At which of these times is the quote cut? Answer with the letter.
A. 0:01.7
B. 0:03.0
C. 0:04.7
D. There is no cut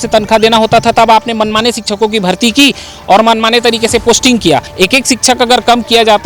C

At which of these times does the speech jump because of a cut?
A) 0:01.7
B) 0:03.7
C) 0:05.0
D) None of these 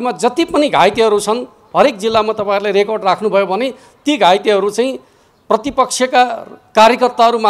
D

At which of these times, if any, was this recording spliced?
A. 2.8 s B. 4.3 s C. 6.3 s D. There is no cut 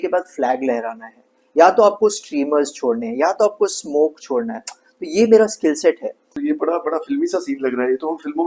C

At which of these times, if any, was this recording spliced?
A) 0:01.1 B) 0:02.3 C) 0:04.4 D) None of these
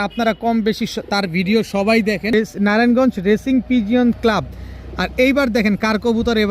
B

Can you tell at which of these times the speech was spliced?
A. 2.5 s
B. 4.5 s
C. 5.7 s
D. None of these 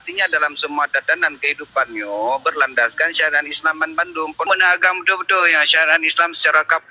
B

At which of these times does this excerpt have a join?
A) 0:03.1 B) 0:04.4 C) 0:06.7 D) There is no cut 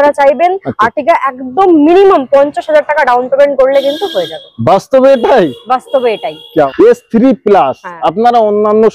C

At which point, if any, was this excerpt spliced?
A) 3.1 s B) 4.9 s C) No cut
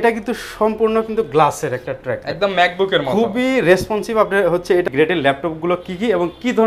B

